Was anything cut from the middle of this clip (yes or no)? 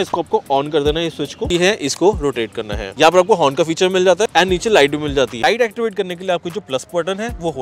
yes